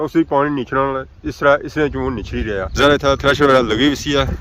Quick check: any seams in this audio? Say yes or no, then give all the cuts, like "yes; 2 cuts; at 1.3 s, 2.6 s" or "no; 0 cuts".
yes; 1 cut; at 2.7 s